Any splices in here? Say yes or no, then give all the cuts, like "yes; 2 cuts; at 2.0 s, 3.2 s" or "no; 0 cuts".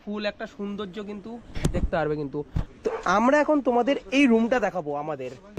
no; 0 cuts